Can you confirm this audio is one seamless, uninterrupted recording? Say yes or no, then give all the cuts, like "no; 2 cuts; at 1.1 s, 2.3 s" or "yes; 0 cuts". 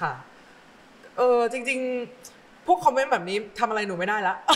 yes; 0 cuts